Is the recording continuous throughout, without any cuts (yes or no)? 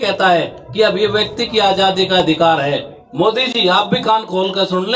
no